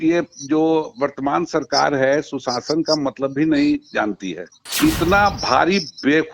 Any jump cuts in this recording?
yes; 1 cut; at 4.7 s

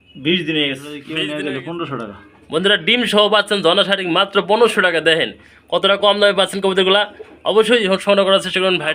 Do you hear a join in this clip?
yes; 1 cut; at 1.0 s

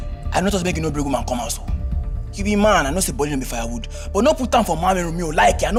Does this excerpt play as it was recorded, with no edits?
yes; 0 cuts

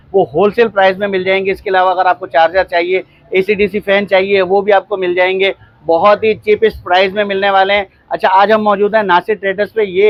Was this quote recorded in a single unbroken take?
yes; 0 cuts

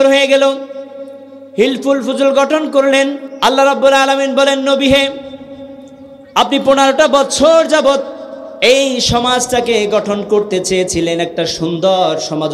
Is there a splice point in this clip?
yes; 1 cut; at 3.2 s

